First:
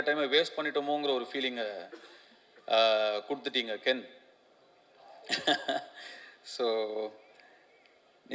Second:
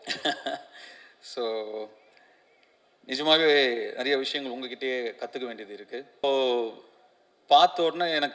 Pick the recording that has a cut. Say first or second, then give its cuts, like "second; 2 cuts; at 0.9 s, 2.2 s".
second; 1 cut; at 6.2 s